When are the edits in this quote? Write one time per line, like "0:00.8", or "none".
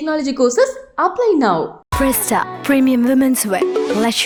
none